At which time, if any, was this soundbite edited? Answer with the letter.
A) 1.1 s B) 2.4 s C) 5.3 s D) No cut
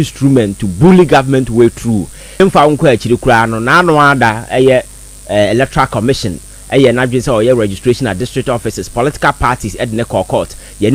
B